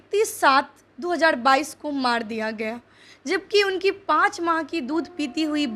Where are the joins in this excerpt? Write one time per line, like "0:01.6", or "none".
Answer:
none